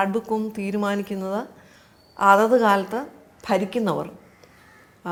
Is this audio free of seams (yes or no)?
yes